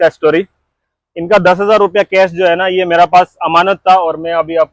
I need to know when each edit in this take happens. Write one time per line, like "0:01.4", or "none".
none